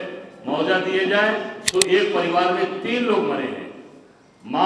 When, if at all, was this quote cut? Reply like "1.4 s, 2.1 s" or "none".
1.5 s